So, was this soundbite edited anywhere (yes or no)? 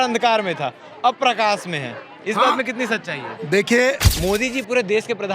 yes